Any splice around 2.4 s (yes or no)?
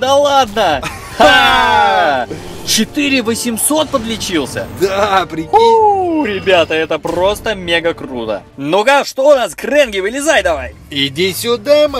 no